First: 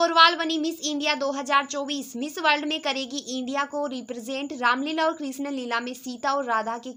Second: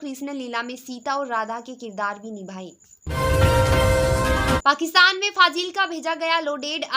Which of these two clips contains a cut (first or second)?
second